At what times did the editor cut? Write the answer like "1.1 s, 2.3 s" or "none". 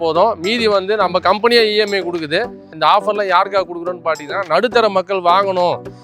2.6 s